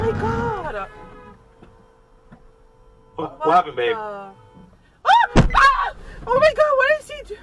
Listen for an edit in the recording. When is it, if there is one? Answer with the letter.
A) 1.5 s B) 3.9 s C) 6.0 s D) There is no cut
D